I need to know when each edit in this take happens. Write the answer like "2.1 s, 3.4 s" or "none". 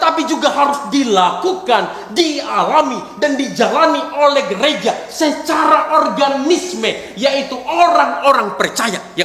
none